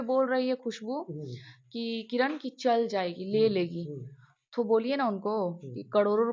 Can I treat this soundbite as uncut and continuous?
yes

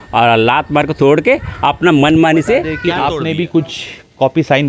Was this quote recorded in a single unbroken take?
no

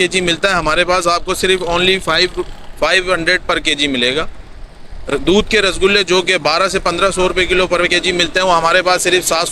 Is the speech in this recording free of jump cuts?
yes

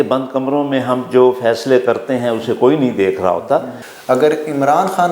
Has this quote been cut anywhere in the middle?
yes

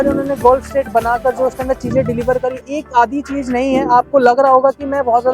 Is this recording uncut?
no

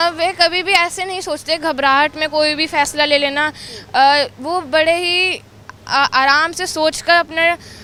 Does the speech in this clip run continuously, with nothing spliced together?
yes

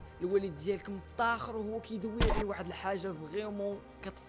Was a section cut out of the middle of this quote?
yes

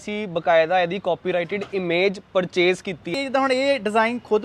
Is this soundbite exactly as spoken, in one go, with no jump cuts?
no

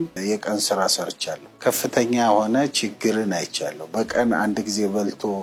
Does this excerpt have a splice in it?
no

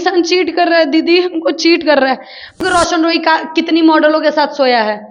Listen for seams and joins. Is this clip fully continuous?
no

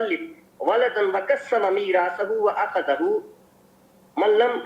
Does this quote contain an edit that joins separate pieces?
yes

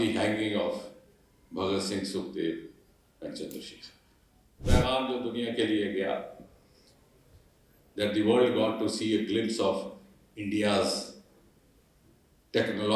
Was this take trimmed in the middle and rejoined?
yes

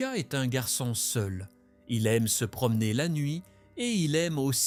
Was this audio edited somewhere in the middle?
no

